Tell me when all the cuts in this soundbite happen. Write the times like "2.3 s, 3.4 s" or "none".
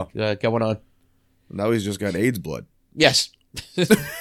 none